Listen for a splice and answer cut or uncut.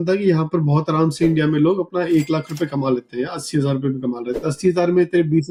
uncut